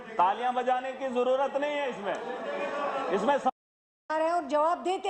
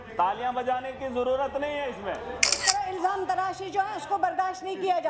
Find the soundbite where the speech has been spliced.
second; 1 cut; at 2.6 s

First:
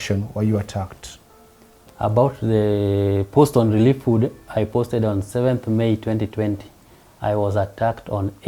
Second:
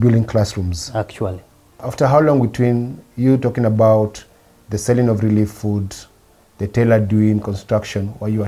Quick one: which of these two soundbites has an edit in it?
second; 1 cut; at 1.8 s

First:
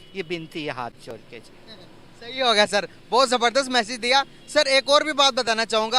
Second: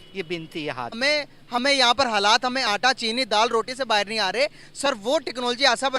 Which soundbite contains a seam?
second; 1 cut; at 1.0 s

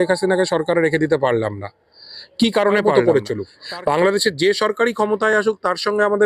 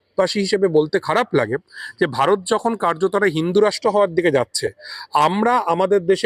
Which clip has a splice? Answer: first; 1 cut; at 2.9 s

